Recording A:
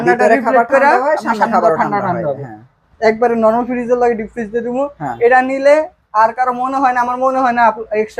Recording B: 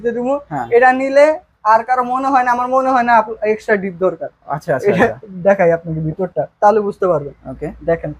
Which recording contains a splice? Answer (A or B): A